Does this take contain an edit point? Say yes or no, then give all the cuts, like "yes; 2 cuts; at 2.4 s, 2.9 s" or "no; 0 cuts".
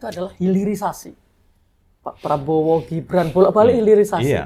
no; 0 cuts